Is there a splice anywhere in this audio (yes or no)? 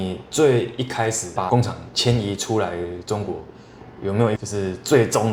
no